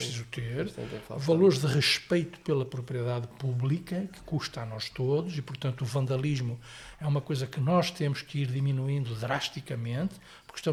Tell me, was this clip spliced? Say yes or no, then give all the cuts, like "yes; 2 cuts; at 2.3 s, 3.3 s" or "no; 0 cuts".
no; 0 cuts